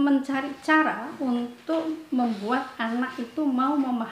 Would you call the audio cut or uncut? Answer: uncut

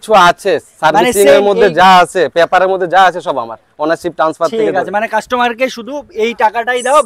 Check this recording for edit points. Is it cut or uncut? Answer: uncut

